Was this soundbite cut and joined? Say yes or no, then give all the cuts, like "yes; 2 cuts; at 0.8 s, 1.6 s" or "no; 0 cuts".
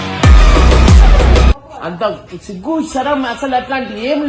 yes; 1 cut; at 1.6 s